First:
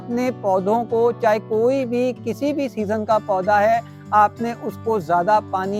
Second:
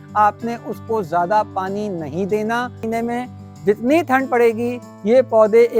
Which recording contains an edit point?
second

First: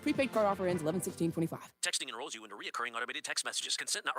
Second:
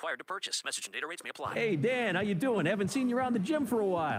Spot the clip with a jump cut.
first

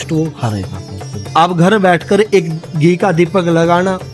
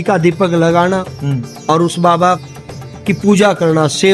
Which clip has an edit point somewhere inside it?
first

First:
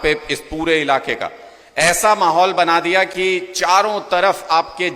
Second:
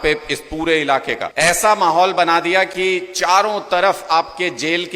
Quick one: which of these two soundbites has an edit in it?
second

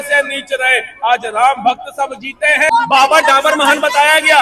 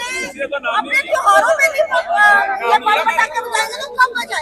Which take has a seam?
first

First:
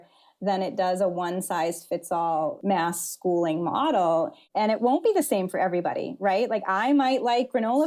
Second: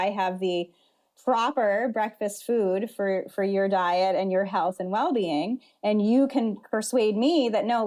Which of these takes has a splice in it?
first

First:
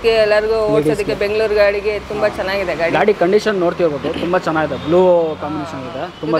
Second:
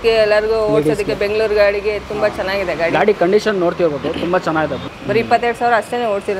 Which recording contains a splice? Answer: second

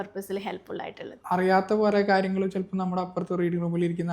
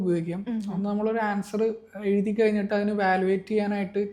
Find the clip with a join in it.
first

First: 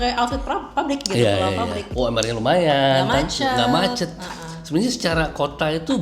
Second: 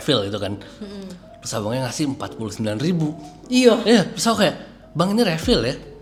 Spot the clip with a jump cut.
first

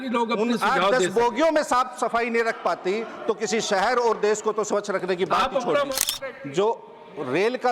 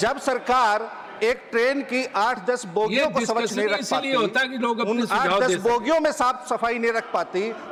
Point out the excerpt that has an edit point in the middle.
first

